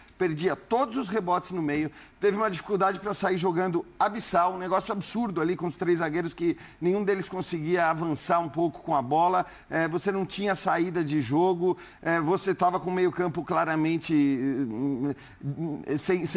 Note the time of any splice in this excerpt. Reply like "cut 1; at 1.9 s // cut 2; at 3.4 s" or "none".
none